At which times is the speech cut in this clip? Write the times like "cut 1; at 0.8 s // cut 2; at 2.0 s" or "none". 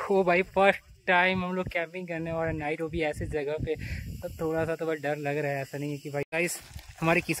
cut 1; at 6.3 s